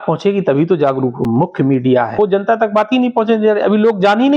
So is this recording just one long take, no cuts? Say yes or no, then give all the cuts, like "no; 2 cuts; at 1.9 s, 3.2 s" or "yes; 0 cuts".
no; 2 cuts; at 1.2 s, 2.1 s